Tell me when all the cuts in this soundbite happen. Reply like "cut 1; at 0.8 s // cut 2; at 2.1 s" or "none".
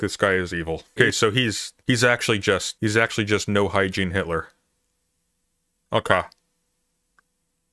cut 1; at 0.9 s // cut 2; at 1.7 s // cut 3; at 2.7 s